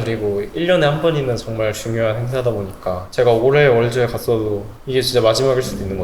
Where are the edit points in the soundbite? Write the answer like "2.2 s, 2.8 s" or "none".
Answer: 3.0 s

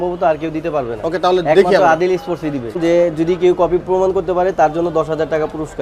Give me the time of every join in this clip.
2.8 s

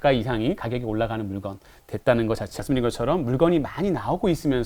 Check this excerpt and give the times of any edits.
2.5 s

